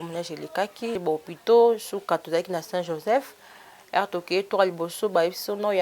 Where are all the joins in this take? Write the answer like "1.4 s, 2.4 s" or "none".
1.0 s